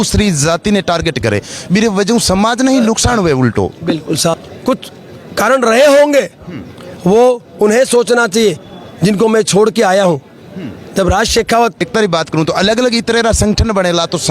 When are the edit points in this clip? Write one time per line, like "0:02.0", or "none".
0:04.4
0:11.8